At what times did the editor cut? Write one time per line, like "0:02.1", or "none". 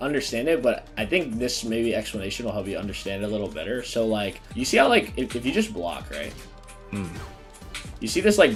none